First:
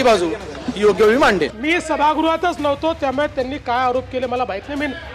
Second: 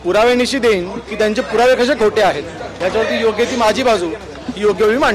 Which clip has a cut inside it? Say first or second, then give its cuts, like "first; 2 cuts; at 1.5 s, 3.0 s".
second; 1 cut; at 2.6 s